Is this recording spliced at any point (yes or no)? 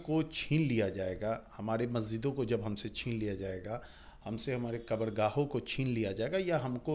no